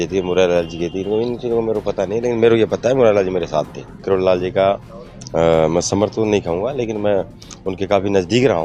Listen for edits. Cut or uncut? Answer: cut